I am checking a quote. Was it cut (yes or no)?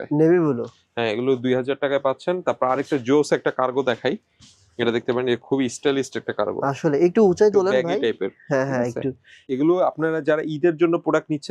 yes